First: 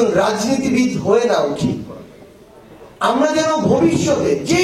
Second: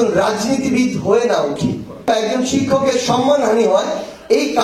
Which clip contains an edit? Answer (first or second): second